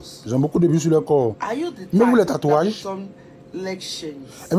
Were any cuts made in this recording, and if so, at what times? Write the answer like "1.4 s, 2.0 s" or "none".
none